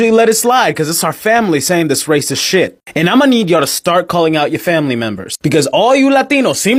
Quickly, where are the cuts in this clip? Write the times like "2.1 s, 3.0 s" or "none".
none